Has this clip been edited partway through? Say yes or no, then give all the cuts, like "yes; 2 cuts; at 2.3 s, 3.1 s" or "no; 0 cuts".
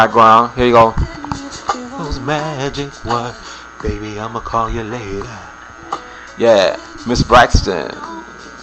no; 0 cuts